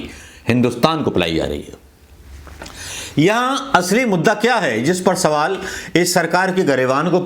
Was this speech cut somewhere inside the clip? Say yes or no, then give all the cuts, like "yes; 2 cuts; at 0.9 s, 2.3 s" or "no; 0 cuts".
no; 0 cuts